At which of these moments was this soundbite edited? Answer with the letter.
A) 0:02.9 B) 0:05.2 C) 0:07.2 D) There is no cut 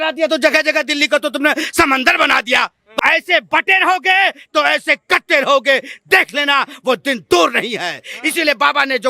A